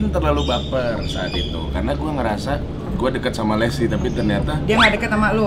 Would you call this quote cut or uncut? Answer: uncut